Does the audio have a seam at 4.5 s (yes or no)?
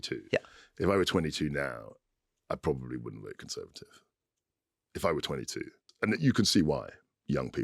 no